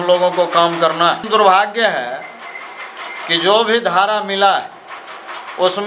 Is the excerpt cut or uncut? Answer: cut